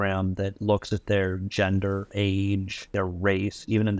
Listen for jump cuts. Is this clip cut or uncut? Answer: cut